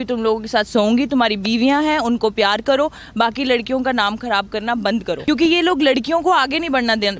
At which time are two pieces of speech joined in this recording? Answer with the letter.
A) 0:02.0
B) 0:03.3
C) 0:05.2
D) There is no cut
C